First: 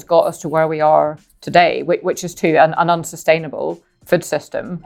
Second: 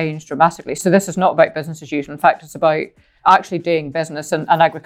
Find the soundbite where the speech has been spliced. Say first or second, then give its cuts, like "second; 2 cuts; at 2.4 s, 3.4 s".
second; 2 cuts; at 0.8 s, 3.2 s